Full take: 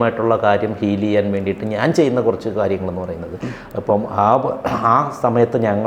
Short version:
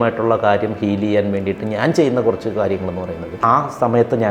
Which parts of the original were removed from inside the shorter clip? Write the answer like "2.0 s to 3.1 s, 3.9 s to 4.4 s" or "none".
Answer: 3.4 s to 4.8 s